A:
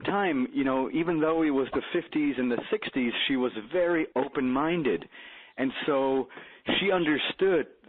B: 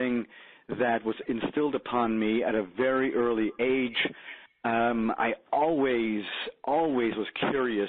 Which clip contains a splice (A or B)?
B